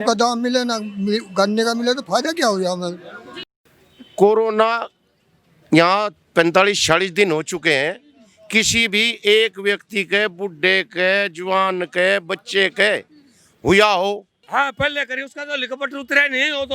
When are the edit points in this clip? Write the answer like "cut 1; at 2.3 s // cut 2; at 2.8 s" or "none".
cut 1; at 3.5 s // cut 2; at 14.3 s